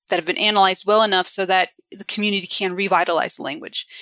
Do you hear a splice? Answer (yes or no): no